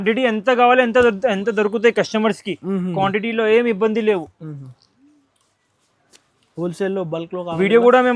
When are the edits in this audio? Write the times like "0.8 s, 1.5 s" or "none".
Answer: none